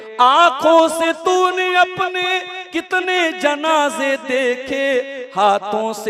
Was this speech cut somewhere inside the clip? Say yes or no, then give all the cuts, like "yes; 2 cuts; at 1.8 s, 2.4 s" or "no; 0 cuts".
no; 0 cuts